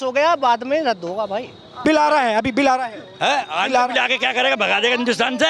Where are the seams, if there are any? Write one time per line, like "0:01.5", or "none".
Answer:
0:01.8